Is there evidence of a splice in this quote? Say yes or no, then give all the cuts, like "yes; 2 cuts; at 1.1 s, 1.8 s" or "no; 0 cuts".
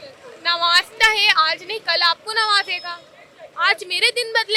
no; 0 cuts